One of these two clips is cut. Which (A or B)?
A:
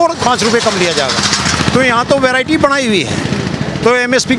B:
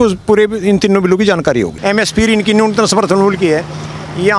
B